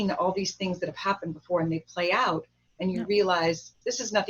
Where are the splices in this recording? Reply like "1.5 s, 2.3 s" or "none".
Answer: none